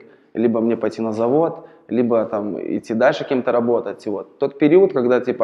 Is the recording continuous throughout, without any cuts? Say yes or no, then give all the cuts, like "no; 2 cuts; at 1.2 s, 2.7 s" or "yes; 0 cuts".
yes; 0 cuts